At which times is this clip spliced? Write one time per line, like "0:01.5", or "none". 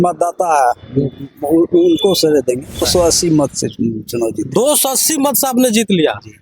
0:02.9